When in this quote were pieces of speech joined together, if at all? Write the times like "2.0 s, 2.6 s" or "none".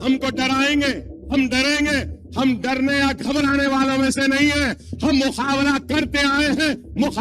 1.1 s